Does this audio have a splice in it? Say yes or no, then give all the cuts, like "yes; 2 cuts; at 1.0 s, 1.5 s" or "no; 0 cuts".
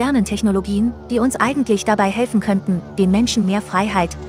no; 0 cuts